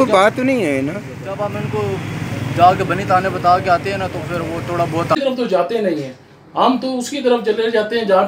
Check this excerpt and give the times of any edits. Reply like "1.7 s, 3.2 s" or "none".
5.2 s